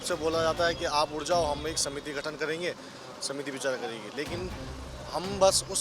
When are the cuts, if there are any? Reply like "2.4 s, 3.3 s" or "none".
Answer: none